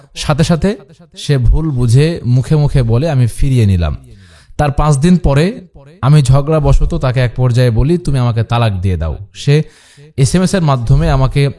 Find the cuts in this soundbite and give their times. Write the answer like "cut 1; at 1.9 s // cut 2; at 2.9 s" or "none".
none

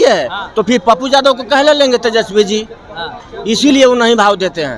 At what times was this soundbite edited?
none

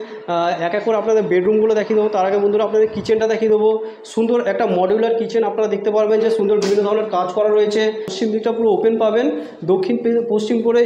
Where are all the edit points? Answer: cut 1; at 8.1 s

